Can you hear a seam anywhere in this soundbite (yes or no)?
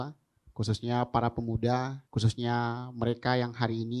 yes